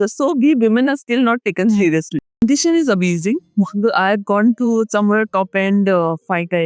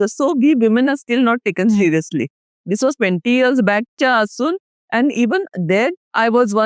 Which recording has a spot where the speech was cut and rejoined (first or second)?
first